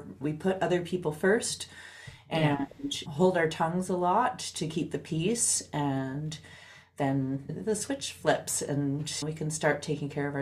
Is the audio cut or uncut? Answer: cut